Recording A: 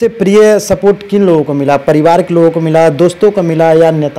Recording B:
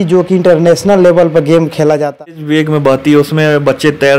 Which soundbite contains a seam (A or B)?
B